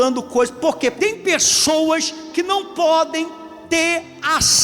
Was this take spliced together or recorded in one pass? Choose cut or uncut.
cut